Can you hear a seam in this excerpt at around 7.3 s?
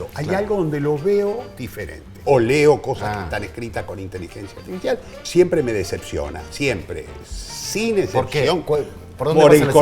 no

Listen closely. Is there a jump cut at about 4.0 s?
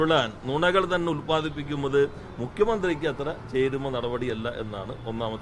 no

